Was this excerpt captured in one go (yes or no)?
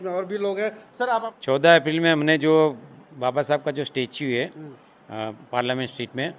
no